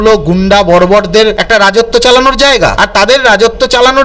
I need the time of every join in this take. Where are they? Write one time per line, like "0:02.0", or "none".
0:01.4
0:02.8